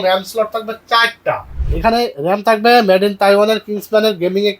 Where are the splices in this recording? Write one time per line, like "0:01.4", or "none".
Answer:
0:01.7